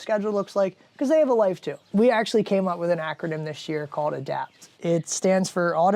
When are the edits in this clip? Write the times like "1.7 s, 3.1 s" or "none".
1.8 s, 4.7 s